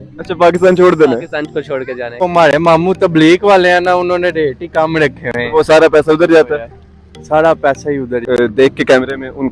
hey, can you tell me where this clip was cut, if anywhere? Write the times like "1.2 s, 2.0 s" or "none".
2.2 s, 8.2 s